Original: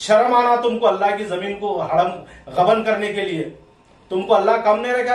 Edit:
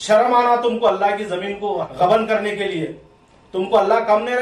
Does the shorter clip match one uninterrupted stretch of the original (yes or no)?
no